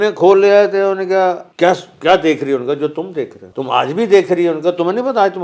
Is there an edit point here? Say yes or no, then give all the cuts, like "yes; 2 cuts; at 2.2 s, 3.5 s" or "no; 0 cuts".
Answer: yes; 2 cuts; at 1.5 s, 3.4 s